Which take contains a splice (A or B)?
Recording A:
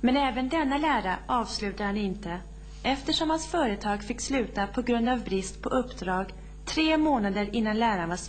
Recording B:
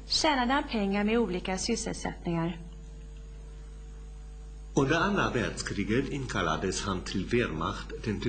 B